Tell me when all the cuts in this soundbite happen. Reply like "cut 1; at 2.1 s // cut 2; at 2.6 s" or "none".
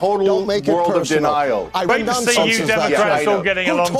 cut 1; at 1.9 s